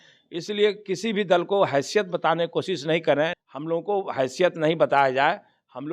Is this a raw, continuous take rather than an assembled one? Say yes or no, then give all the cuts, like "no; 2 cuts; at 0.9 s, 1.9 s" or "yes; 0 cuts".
no; 1 cut; at 3.4 s